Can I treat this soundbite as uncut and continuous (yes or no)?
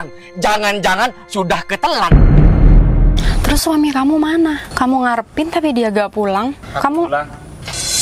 no